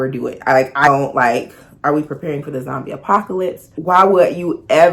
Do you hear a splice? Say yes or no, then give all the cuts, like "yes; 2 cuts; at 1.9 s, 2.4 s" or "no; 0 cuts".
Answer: yes; 2 cuts; at 0.9 s, 3.7 s